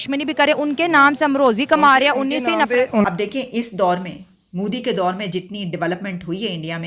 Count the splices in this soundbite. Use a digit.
1